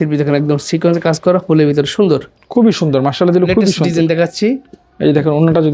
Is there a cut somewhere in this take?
no; 0 cuts

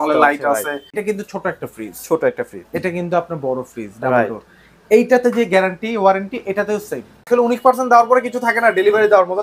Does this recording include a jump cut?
yes; 2 cuts; at 1.0 s, 7.2 s

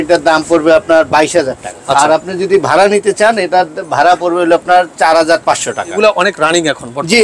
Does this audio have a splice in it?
yes; 2 cuts; at 1.7 s, 6.0 s

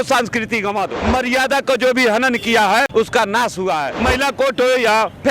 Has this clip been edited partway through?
yes; 3 cuts; at 0.9 s, 2.9 s, 4.0 s

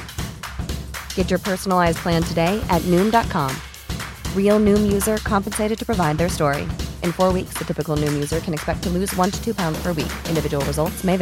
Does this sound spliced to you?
no; 0 cuts

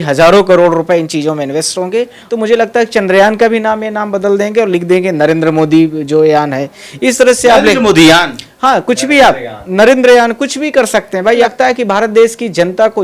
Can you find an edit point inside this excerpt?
yes; 2 cuts; at 2.2 s, 11.4 s

